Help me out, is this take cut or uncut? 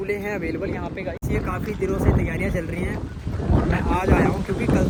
uncut